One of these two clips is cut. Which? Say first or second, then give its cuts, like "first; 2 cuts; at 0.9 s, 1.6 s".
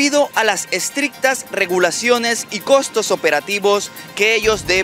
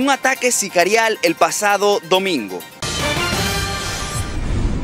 second; 1 cut; at 2.7 s